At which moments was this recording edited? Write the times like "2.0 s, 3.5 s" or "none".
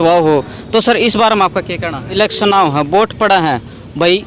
2.1 s